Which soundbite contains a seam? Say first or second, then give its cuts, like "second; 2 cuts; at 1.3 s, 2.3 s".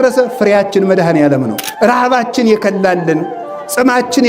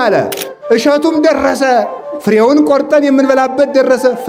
first; 1 cut; at 1.6 s